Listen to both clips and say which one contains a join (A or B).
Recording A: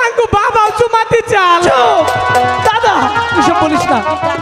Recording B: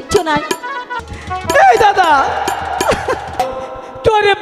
B